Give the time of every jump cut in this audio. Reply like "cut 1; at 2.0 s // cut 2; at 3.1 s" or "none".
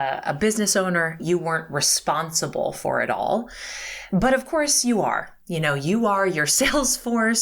cut 1; at 1.2 s